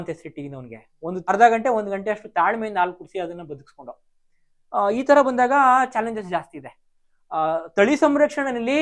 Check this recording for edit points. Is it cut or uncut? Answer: cut